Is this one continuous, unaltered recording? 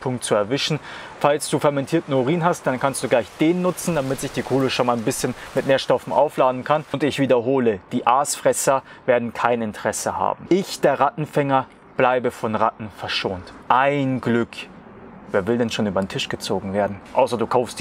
no; 1 cut; at 6.9 s

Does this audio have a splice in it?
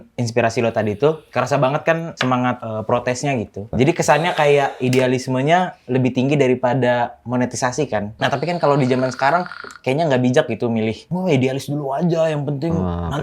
yes; 4 cuts; at 2.2 s, 3.7 s, 8.1 s, 11.0 s

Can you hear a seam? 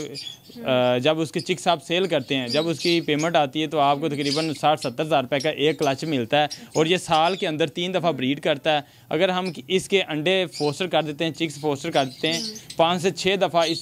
no; 0 cuts

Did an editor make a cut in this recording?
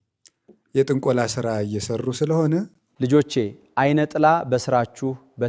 no; 0 cuts

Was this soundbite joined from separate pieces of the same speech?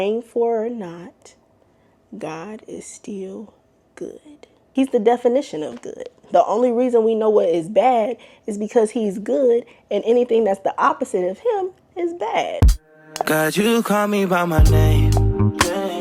yes; 2 cuts; at 4.5 s, 12.8 s

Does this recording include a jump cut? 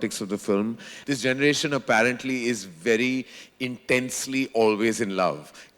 yes; 1 cut; at 0.9 s

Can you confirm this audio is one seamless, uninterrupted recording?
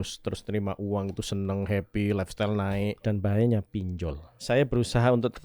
no; 2 cuts; at 3.0 s, 4.3 s

